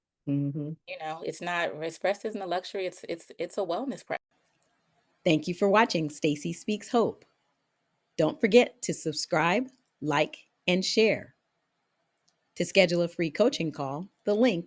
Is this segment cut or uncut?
cut